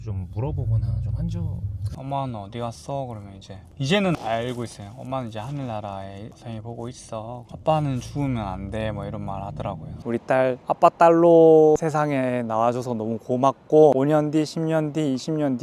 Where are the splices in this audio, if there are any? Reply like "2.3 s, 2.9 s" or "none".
1.8 s, 7.5 s, 9.9 s, 11.8 s, 13.9 s